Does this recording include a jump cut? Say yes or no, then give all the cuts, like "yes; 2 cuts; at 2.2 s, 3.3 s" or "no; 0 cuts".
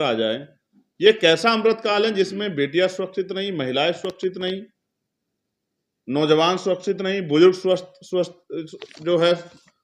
no; 0 cuts